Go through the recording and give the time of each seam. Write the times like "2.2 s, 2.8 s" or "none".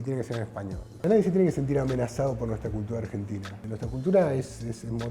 1.0 s, 3.6 s